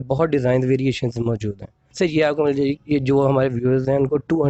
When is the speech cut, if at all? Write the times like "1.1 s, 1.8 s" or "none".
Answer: 1.8 s